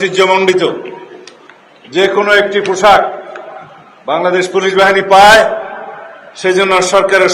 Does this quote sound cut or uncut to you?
uncut